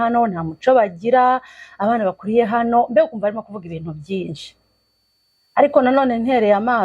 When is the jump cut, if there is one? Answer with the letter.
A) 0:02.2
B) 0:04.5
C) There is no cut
C